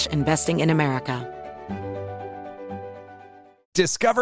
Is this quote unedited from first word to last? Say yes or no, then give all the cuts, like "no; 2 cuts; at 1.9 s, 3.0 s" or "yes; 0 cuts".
yes; 0 cuts